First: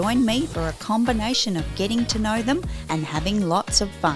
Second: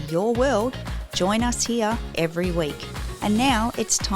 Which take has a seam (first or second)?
second